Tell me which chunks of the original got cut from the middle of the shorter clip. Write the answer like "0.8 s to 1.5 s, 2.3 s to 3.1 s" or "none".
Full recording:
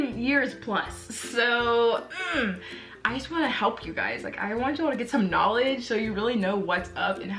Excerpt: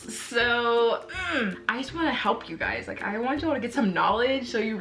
2.6 s to 3.0 s